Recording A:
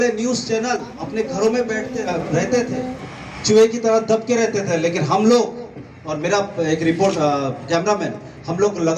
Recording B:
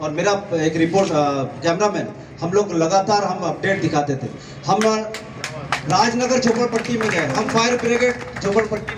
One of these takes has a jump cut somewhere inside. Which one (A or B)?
A